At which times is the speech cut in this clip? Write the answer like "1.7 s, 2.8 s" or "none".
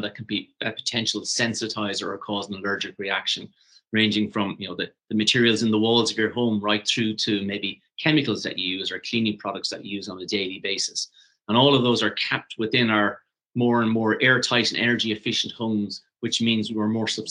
none